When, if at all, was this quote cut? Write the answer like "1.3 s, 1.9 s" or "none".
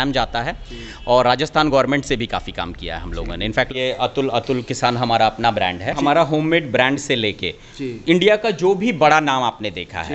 3.7 s, 5.9 s